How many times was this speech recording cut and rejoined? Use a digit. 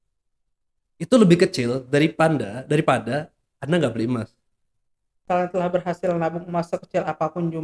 1